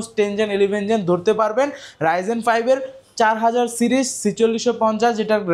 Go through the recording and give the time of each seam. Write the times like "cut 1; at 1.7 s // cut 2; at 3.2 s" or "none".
none